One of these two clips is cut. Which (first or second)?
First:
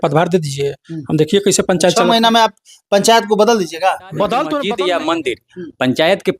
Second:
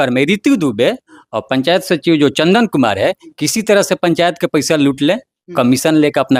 first